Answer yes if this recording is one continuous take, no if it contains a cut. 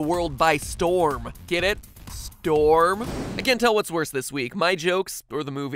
no